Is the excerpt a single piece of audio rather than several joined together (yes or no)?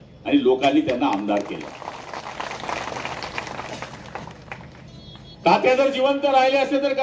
yes